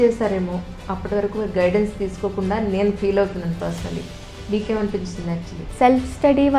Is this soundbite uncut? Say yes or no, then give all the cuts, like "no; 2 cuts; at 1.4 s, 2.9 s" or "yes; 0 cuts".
no; 1 cut; at 5.6 s